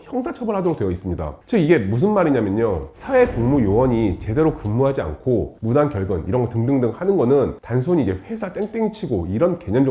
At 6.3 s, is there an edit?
no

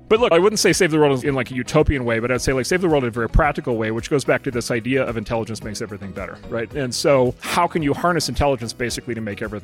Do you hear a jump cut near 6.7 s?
yes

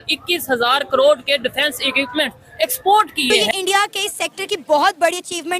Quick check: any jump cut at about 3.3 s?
yes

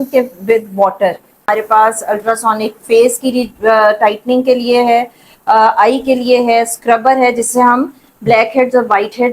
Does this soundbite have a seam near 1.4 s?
yes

